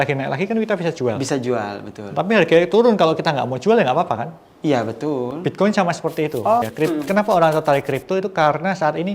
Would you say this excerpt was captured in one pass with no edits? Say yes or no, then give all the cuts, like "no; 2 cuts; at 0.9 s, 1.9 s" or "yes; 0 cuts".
no; 1 cut; at 6.7 s